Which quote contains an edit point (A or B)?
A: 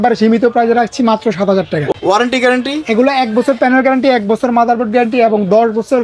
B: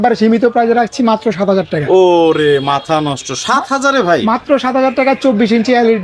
A